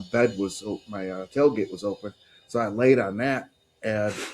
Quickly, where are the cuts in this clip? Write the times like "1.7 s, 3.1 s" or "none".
none